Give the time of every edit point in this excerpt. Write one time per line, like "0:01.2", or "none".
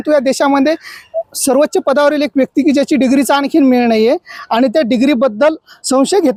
none